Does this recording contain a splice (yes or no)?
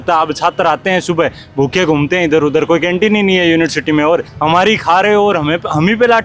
yes